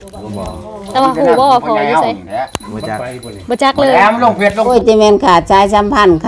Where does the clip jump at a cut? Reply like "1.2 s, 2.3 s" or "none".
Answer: 0.9 s, 4.7 s